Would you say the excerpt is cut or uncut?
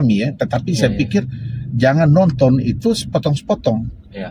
uncut